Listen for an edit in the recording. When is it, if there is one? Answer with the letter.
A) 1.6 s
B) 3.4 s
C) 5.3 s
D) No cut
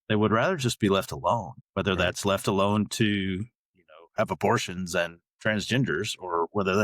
A